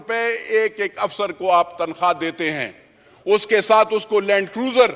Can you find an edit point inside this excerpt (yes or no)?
no